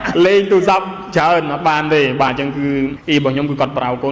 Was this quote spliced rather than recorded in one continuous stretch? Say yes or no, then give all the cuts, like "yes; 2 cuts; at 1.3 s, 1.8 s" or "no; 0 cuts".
yes; 1 cut; at 3.0 s